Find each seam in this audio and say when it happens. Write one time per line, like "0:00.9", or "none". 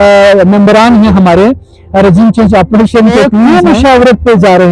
0:03.5